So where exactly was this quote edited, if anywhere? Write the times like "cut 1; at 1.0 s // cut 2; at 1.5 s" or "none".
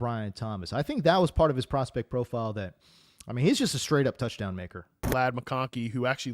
cut 1; at 5.1 s